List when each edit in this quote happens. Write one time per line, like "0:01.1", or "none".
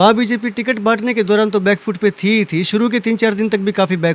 none